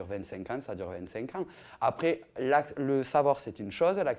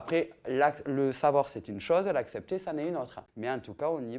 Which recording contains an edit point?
second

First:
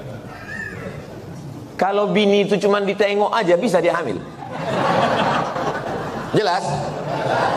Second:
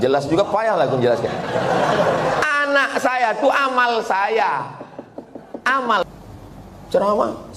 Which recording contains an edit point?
second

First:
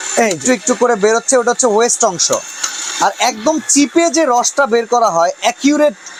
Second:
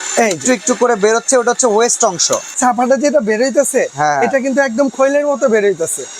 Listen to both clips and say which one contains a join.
second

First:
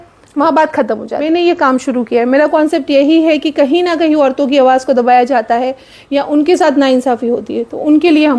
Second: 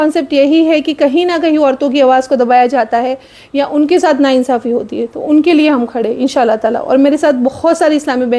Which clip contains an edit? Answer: first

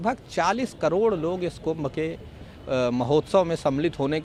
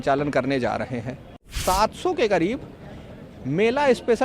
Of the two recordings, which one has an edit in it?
second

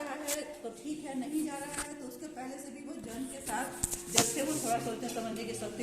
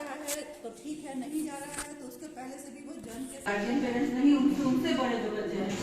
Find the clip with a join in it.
second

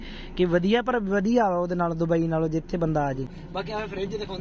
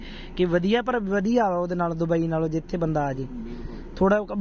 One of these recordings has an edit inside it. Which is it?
first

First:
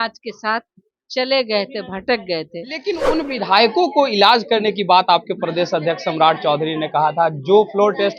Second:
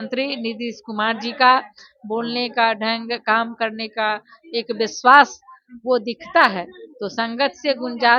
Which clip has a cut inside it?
first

